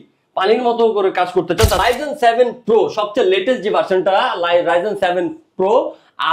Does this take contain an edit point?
yes; 1 cut; at 1.8 s

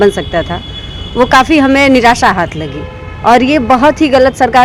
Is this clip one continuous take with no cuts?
yes; 0 cuts

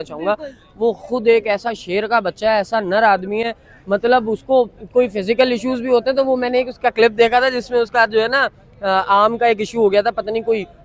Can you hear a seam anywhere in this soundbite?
no; 0 cuts

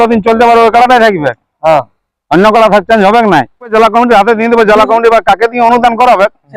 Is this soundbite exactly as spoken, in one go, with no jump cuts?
no; 1 cut; at 3.7 s

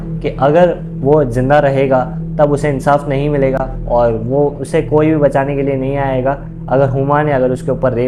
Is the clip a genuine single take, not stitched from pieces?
yes; 0 cuts

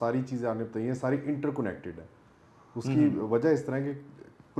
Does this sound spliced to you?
no; 0 cuts

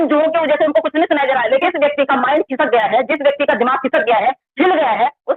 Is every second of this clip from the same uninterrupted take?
no; 1 cut; at 1.6 s

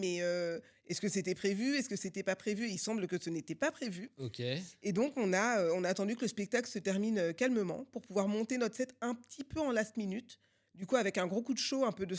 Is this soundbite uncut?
yes; 0 cuts

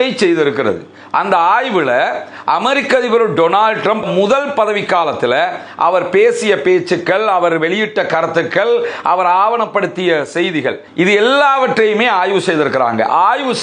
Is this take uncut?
no; 1 cut; at 4.1 s

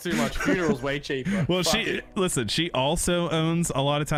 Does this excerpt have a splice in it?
no; 0 cuts

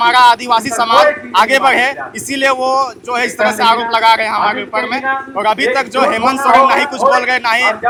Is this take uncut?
yes; 0 cuts

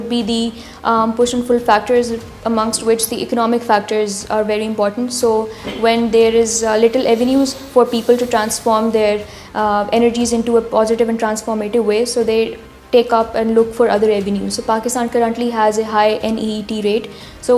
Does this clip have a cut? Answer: no; 0 cuts

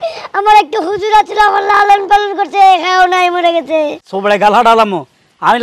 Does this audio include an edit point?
yes; 1 cut; at 4.1 s

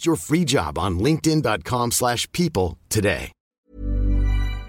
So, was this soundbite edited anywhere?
yes; 1 cut; at 3.7 s

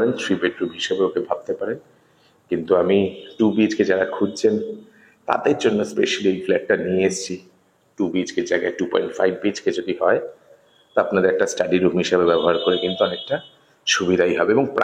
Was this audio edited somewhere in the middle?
no; 0 cuts

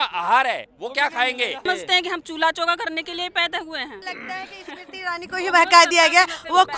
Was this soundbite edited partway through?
yes; 2 cuts; at 1.6 s, 4.0 s

